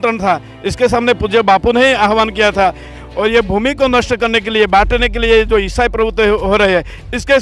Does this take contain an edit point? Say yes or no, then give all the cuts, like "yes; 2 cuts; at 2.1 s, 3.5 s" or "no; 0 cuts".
yes; 1 cut; at 2.9 s